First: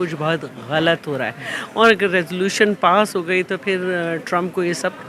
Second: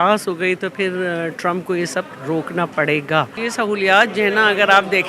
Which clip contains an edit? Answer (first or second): second